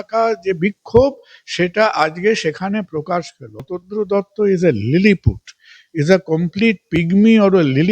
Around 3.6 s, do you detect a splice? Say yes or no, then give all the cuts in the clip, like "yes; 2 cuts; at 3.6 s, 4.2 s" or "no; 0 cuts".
yes; 1 cut; at 3.6 s